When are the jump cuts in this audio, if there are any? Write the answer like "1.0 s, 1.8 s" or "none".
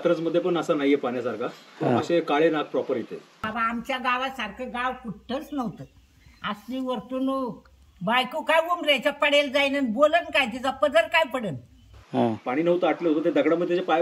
3.4 s, 11.9 s